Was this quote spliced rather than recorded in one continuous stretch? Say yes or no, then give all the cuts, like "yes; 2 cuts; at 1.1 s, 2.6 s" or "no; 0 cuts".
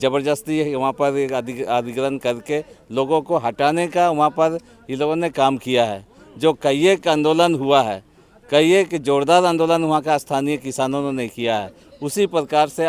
no; 0 cuts